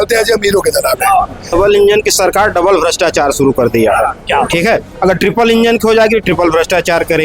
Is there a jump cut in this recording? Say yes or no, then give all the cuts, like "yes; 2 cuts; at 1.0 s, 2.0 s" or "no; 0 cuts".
yes; 1 cut; at 1.5 s